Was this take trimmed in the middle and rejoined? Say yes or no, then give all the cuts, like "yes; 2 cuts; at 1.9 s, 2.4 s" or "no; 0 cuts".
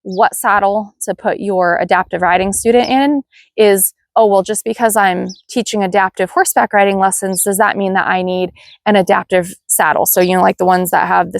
no; 0 cuts